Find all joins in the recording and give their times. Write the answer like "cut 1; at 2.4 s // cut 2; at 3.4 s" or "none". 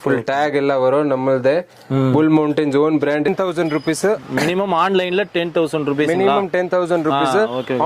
cut 1; at 3.3 s